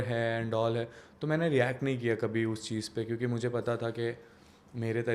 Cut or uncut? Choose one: uncut